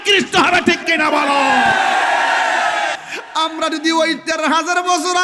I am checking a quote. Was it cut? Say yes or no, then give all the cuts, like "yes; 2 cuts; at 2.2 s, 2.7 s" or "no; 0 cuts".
yes; 1 cut; at 3.0 s